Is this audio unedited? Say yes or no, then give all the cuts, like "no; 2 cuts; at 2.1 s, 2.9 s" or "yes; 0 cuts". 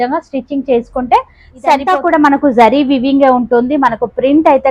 no; 1 cut; at 1.8 s